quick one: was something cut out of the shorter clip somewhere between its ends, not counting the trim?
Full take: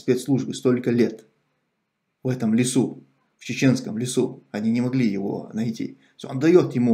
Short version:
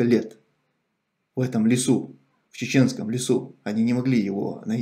no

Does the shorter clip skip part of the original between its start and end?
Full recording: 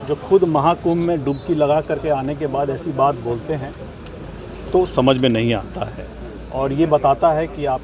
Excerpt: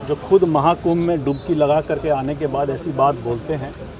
no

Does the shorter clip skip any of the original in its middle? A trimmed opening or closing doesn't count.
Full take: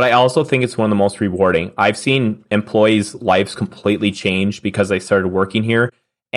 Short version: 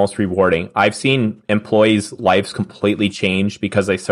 no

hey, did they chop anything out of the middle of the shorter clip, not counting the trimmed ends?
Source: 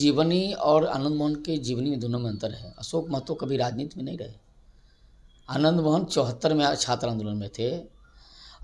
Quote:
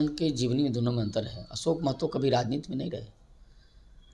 no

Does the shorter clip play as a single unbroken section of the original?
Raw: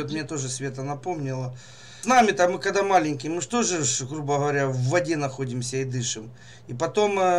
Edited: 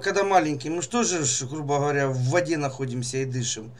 yes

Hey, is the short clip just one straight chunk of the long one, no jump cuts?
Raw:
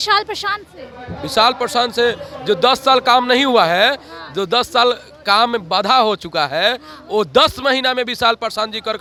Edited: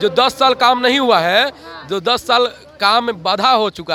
yes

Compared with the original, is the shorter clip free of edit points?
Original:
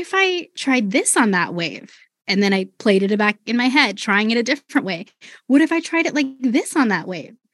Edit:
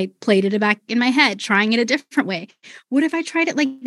yes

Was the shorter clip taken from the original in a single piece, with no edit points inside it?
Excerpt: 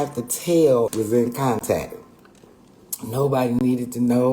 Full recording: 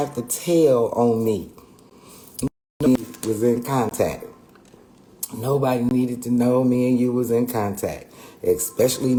no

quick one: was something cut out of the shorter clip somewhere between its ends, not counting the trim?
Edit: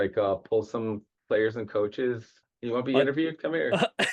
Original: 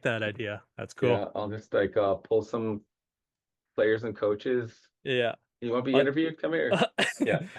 yes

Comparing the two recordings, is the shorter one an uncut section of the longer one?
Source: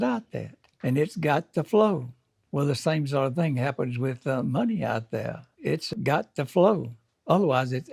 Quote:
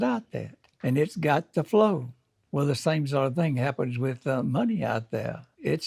yes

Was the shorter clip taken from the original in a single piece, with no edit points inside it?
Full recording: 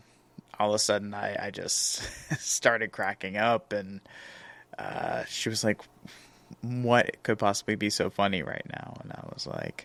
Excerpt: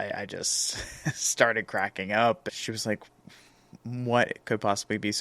no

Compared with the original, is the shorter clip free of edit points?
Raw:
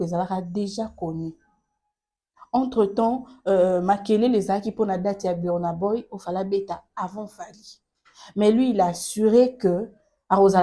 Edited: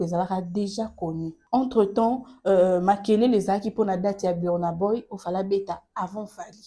no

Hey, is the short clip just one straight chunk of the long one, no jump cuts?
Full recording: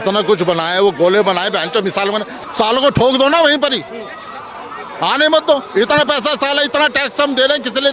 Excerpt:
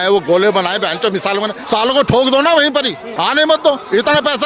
no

